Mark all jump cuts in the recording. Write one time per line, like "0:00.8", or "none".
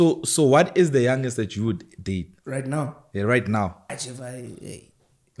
0:02.4
0:03.9